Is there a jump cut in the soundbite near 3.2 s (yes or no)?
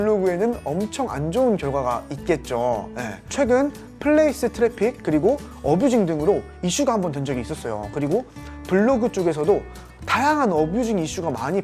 yes